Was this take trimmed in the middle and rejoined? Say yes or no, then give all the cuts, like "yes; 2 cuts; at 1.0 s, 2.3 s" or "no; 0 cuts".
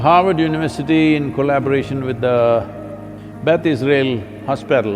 no; 0 cuts